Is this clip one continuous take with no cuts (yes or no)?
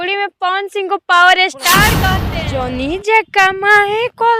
no